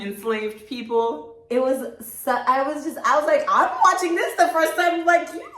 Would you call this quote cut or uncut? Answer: uncut